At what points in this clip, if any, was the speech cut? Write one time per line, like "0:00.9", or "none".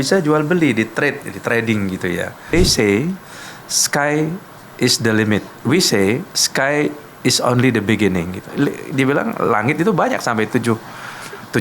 0:02.5
0:05.6
0:08.5